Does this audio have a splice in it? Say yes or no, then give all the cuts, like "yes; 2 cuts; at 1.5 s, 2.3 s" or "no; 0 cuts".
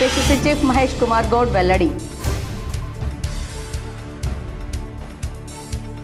no; 0 cuts